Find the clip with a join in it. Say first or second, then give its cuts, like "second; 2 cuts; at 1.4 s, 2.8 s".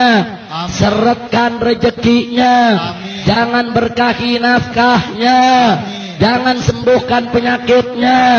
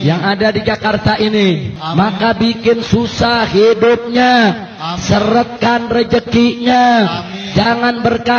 second; 1 cut; at 1.8 s